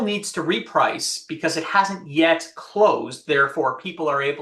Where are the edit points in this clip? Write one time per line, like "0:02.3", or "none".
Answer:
none